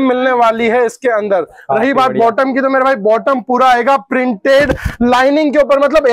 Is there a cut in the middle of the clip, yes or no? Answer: no